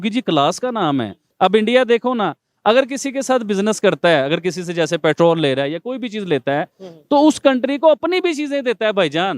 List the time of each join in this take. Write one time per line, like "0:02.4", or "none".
0:01.2